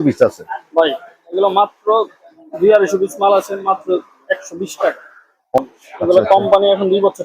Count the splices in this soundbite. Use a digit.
1